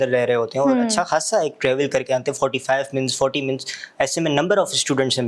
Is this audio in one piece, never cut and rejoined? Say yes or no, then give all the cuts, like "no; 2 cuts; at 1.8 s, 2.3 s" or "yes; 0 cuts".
yes; 0 cuts